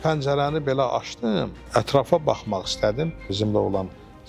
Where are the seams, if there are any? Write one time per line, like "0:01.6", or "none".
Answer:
0:01.6
0:03.3